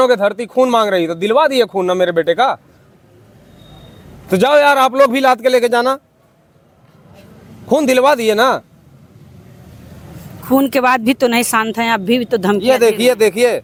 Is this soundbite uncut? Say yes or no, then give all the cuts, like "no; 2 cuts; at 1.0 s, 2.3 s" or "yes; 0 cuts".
yes; 0 cuts